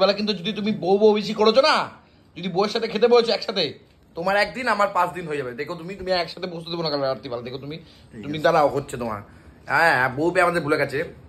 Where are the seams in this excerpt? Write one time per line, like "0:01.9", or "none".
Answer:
none